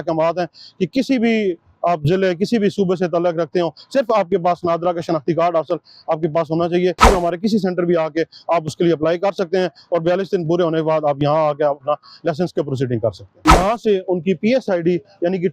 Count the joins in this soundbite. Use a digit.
2